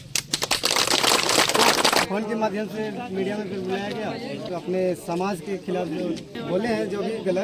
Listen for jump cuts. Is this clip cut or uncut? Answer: cut